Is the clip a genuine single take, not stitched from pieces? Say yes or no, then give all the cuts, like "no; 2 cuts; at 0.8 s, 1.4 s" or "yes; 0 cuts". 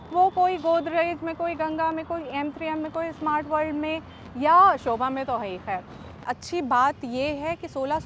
no; 1 cut; at 6.3 s